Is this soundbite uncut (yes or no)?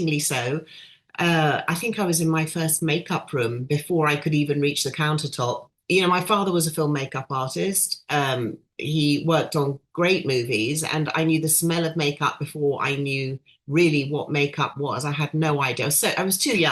no